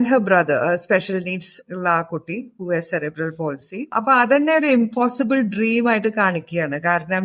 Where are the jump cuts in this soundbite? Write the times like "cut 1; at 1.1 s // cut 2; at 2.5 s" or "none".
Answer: cut 1; at 3.9 s